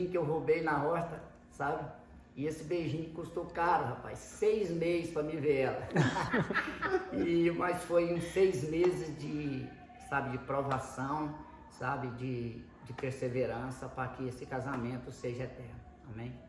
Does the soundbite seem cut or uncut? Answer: uncut